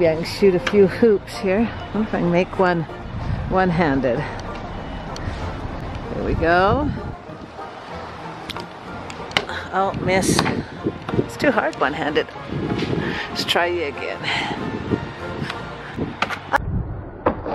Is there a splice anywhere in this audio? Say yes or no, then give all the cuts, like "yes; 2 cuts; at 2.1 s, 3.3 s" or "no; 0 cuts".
no; 0 cuts